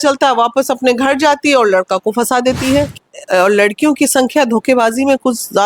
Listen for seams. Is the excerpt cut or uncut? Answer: cut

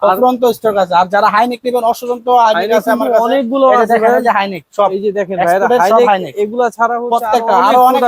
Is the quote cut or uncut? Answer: uncut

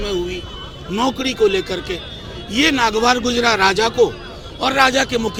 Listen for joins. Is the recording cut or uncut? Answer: uncut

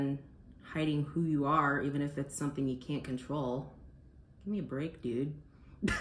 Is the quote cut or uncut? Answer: uncut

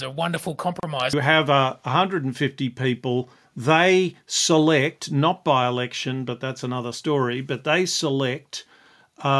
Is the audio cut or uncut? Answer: cut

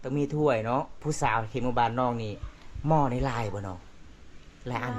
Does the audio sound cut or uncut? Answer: cut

